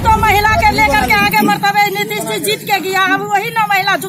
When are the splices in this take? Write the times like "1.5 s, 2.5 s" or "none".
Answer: none